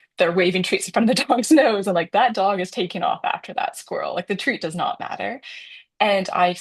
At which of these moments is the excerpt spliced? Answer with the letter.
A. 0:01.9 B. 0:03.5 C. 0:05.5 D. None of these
D